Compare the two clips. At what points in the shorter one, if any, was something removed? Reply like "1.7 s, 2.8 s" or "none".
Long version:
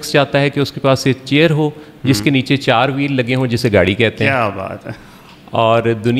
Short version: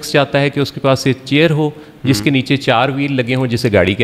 none